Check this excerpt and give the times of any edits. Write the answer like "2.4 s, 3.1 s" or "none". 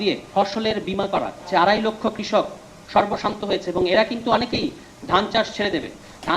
1.4 s